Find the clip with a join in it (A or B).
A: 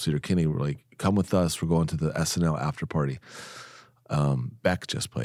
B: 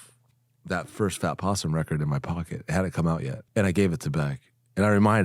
B